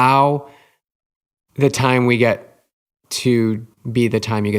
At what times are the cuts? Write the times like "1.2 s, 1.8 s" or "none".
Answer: 3.7 s